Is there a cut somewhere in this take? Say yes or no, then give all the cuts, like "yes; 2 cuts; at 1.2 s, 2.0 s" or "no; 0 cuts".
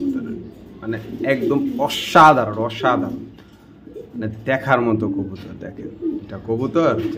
no; 0 cuts